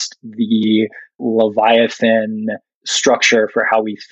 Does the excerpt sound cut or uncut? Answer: cut